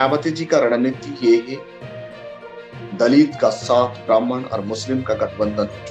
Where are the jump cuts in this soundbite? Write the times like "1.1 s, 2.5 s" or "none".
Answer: 1.6 s, 2.9 s